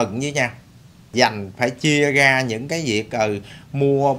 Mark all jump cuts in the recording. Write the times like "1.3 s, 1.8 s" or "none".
1.1 s